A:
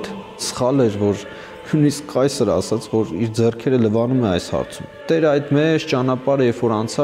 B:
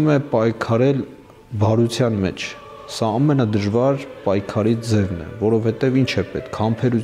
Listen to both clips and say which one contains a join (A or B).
A